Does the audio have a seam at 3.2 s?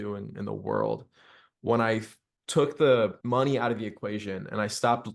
yes; 1 cut; at 3.2 s

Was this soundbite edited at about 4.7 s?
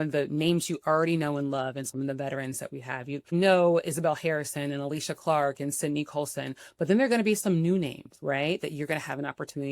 no; 1 cut; at 3.3 s

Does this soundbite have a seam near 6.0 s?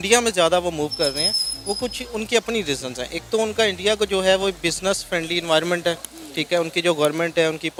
no; 0 cuts

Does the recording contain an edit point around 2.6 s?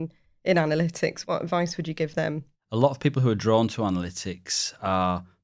yes; 2 cuts; at 1.2 s, 2.6 s

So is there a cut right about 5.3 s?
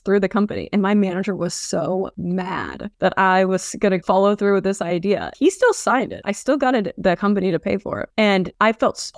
yes; 1 cut; at 5.3 s

